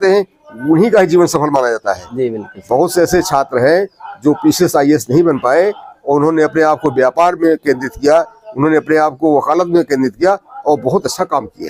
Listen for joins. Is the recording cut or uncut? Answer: uncut